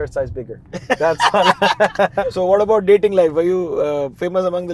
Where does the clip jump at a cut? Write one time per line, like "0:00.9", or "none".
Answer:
0:02.1